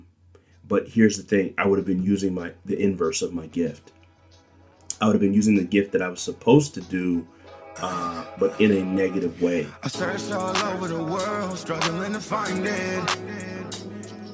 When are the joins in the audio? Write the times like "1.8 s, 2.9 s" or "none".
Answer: 9.8 s